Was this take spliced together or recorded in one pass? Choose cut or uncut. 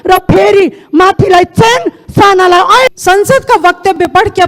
cut